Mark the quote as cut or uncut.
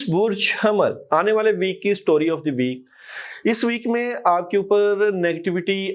uncut